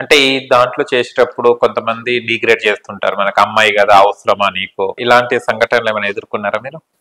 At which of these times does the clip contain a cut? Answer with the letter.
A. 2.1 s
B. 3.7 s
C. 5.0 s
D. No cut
C